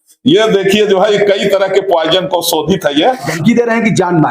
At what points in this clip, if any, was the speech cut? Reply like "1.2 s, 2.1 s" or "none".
3.3 s